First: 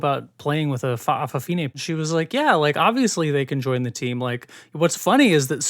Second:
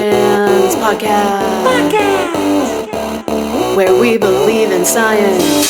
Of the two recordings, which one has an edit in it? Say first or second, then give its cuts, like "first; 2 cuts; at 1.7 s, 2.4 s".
first; 1 cut; at 1.7 s